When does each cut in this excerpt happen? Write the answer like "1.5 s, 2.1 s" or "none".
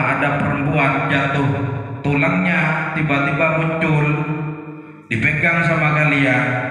none